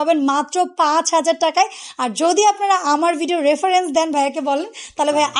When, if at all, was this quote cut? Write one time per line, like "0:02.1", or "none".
none